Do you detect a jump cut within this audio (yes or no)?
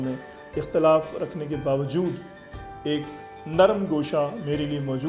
no